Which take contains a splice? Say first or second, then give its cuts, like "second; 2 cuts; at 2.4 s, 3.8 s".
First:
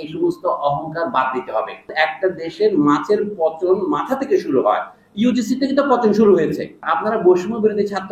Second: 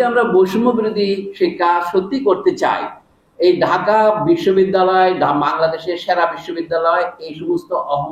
first; 2 cuts; at 1.9 s, 6.9 s